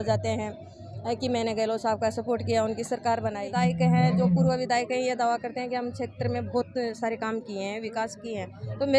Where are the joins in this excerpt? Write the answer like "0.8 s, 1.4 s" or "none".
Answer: 3.5 s